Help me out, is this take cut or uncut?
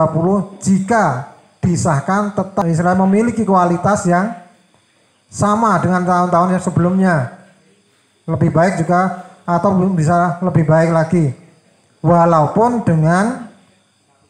cut